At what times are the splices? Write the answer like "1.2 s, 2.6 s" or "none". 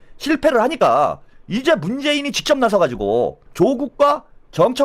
3.4 s